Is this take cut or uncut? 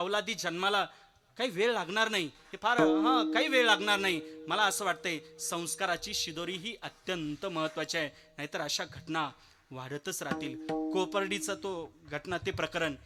uncut